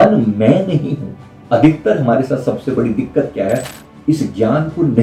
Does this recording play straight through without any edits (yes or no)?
no